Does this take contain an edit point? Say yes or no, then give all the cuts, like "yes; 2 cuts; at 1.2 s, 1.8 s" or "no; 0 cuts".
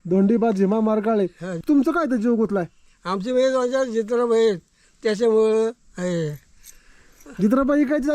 yes; 1 cut; at 1.6 s